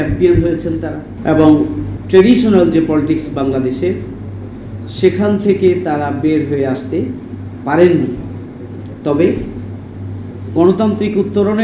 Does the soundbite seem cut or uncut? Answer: cut